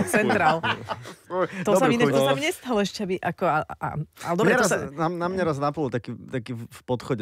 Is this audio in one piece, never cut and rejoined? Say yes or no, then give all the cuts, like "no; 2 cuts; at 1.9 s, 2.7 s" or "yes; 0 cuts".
yes; 0 cuts